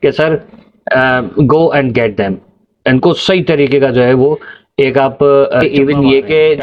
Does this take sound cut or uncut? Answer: cut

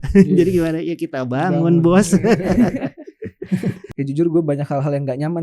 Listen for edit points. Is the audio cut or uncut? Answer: cut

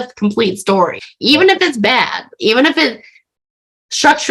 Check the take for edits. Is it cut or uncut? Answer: cut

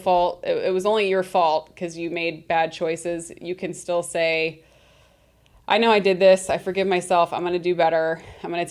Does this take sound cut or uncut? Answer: uncut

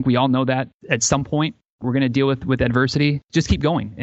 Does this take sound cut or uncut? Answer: uncut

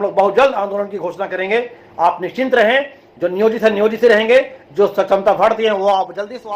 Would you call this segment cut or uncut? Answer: uncut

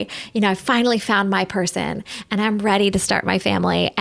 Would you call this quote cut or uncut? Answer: uncut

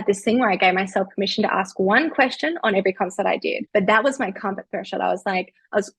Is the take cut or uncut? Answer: cut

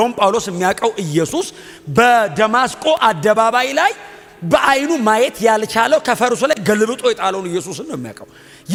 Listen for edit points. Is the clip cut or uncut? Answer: uncut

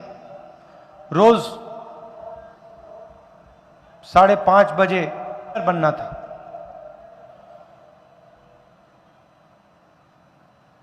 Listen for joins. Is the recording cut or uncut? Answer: cut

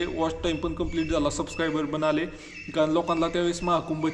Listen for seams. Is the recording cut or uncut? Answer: uncut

